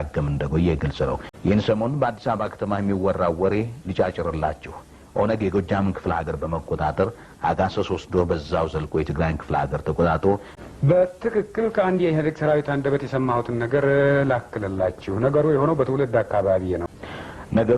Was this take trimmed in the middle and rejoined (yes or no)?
yes